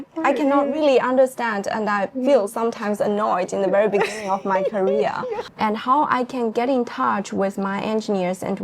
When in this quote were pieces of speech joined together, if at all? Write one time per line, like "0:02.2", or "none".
0:05.4